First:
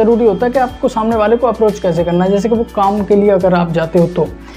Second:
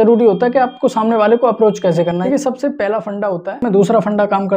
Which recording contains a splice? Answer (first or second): second